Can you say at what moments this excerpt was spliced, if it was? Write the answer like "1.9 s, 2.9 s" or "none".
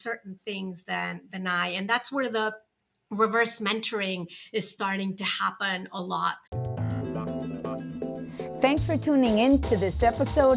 6.4 s